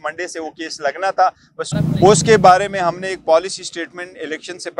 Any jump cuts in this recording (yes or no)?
yes